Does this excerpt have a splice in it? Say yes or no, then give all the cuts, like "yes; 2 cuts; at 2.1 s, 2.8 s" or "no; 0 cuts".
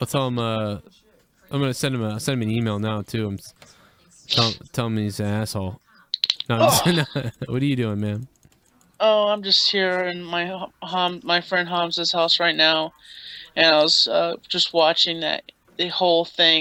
no; 0 cuts